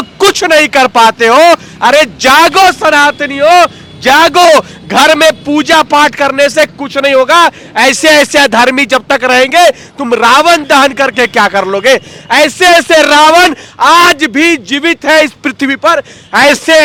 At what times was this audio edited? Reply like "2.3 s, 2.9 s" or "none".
none

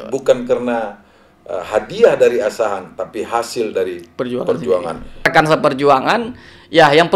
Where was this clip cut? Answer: 5.3 s

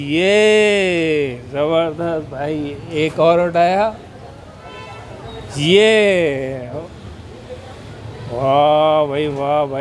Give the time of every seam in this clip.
6.8 s

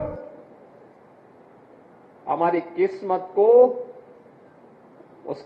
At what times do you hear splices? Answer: none

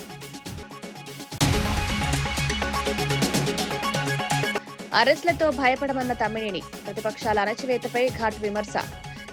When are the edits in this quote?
1.4 s, 4.4 s

